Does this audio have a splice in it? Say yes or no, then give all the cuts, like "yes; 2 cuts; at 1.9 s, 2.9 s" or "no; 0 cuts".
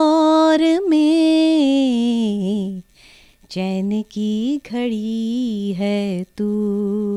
no; 0 cuts